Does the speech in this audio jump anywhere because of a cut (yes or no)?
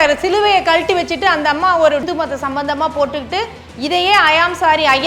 yes